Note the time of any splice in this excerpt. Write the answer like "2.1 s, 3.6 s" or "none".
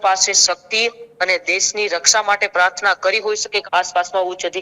3.6 s